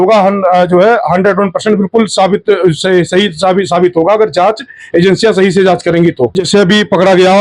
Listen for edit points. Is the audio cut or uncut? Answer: cut